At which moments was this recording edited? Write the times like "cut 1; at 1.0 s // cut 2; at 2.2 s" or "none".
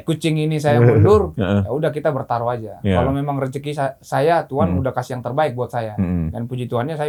none